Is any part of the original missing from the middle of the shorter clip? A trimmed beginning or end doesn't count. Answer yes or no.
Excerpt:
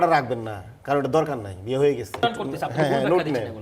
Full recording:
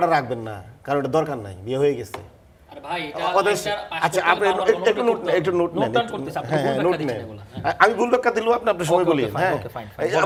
yes